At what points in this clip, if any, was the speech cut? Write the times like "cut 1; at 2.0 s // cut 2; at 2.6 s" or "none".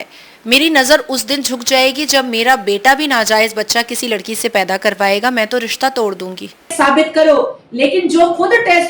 cut 1; at 6.7 s

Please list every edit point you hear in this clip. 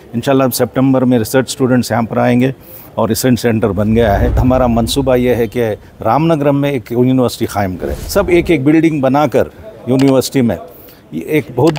cut 1; at 4.4 s // cut 2; at 7.9 s

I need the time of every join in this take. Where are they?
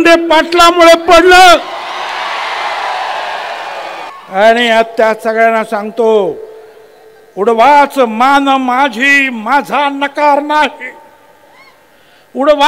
cut 1; at 4.1 s

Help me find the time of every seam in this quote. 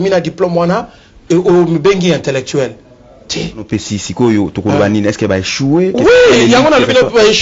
cut 1; at 3.6 s

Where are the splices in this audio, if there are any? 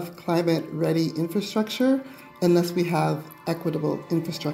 none

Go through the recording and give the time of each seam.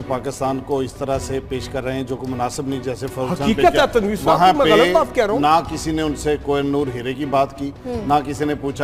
none

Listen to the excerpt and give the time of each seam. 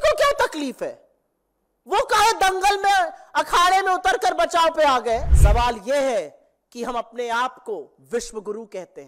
cut 1; at 5.3 s

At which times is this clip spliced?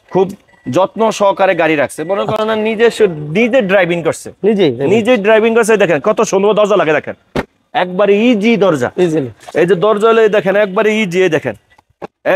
none

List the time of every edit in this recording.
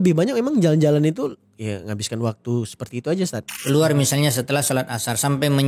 cut 1; at 3.5 s

